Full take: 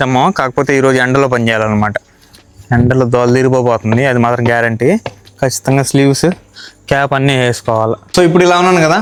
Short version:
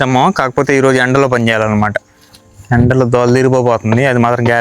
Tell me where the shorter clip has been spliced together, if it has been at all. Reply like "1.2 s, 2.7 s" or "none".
none